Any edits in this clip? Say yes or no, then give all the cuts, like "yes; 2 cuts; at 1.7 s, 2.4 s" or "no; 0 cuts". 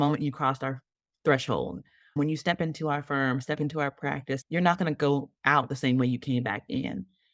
yes; 2 cuts; at 2.2 s, 4.4 s